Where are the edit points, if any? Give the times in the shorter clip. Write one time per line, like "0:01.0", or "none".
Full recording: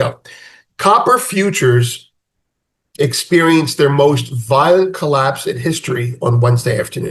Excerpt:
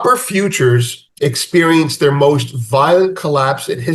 0:01.0